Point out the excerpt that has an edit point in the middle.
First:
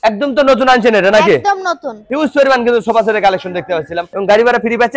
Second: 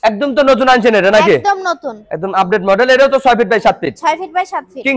first; 2 cuts; at 2.0 s, 4.0 s

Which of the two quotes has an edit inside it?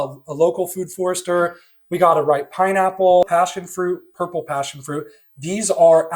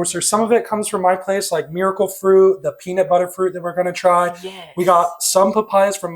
first; 1 cut; at 3.2 s

